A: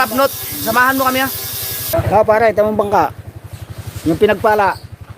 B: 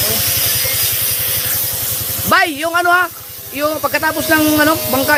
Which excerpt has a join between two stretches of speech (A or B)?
A